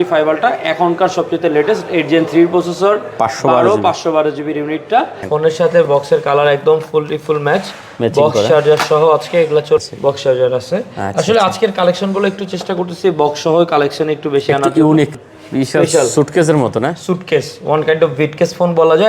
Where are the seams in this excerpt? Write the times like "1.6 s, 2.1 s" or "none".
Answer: 5.2 s, 9.8 s, 15.1 s